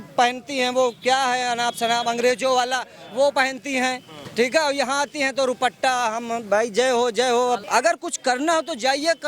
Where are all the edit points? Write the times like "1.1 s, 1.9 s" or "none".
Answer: 7.6 s